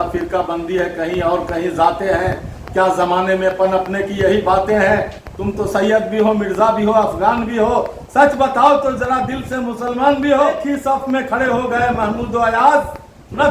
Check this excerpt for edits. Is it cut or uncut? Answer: cut